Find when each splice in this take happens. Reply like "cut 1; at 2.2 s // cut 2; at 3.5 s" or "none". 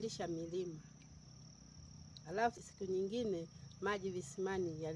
cut 1; at 2.6 s